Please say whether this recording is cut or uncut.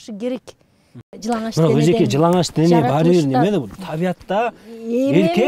cut